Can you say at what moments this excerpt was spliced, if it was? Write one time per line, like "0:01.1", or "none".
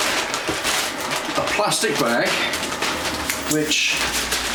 none